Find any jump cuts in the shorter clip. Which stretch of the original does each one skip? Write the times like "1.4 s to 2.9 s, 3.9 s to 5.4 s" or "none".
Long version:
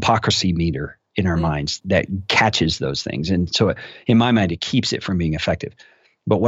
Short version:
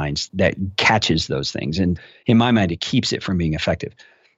3.5 s to 3.8 s